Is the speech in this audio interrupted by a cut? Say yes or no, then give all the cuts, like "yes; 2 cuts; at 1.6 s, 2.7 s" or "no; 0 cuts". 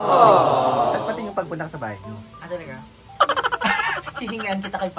no; 0 cuts